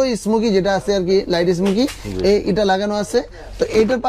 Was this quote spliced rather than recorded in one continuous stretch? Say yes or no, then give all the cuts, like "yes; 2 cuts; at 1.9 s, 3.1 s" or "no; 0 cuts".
no; 0 cuts